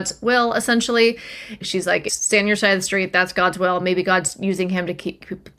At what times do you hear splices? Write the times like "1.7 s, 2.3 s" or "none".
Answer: 1.6 s